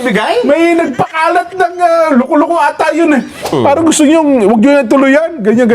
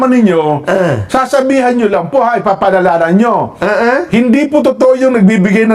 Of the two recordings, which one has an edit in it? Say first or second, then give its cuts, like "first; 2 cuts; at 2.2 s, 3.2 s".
first; 1 cut; at 3.6 s